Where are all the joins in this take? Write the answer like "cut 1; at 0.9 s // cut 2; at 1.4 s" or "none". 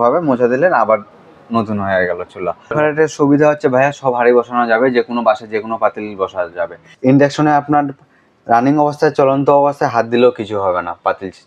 cut 1; at 2.7 s // cut 2; at 6.9 s